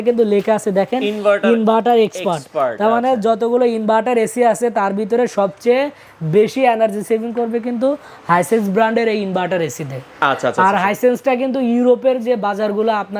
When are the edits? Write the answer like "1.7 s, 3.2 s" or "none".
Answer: none